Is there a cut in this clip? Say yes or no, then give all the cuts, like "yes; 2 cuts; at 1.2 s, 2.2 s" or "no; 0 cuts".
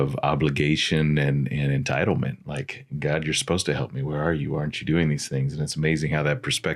no; 0 cuts